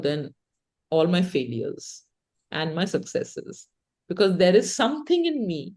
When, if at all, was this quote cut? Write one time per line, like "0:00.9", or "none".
none

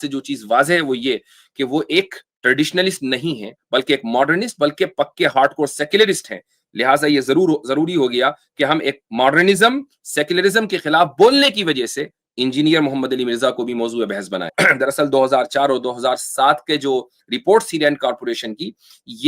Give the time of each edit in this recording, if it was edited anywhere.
0:14.5

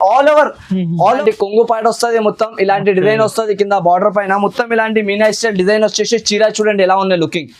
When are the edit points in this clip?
0:01.2

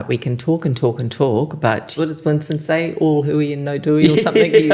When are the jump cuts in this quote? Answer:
0:01.9

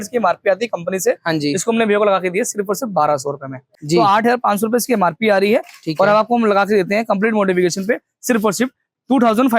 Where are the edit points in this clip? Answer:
0:03.7

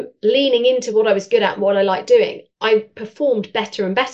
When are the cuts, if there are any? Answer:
none

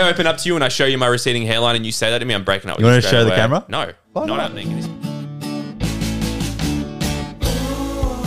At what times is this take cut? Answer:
0:04.6

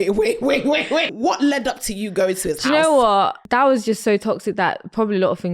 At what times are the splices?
0:01.1
0:03.4

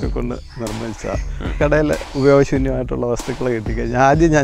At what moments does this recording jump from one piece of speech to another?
none

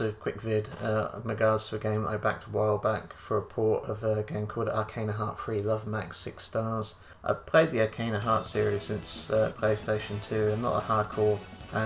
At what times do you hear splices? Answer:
0:07.1

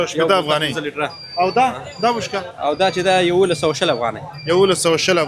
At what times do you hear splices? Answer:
none

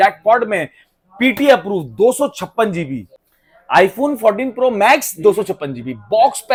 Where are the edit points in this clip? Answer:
none

